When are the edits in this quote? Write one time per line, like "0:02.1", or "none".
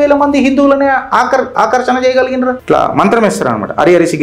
0:02.6